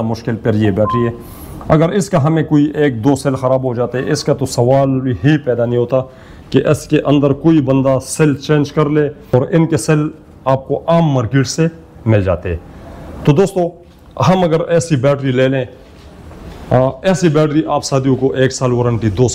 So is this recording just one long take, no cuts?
no; 1 cut; at 9.3 s

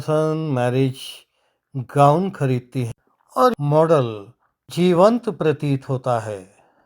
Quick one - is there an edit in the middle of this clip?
yes; 1 cut; at 3.5 s

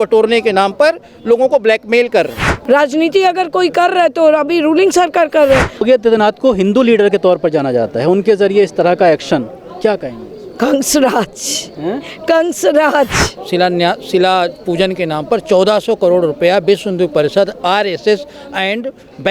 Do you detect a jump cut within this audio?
yes; 3 cuts; at 2.5 s, 5.8 s, 13.4 s

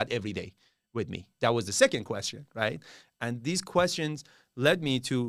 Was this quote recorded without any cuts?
yes; 0 cuts

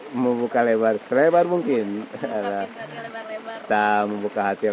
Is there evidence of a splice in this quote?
no; 0 cuts

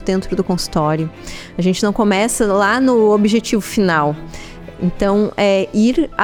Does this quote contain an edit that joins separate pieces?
no; 0 cuts

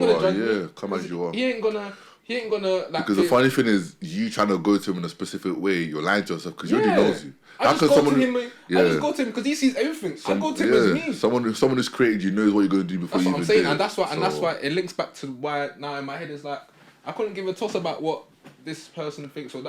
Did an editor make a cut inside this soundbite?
no; 0 cuts

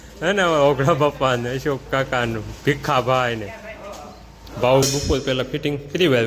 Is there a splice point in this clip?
yes; 1 cut; at 4.9 s

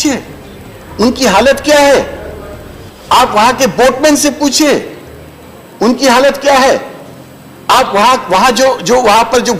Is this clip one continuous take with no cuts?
yes; 0 cuts

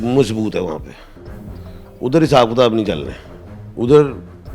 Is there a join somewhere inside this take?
no; 0 cuts

